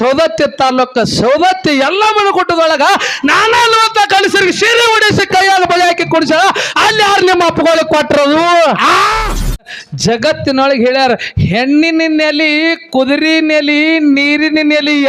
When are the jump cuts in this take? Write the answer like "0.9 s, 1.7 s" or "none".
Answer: 9.8 s